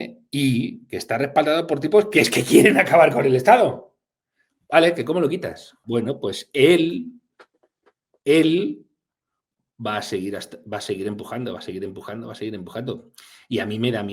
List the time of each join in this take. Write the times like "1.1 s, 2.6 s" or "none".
5.8 s